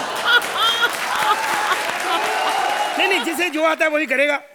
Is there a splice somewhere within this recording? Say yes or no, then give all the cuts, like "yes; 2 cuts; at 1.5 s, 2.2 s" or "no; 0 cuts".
no; 0 cuts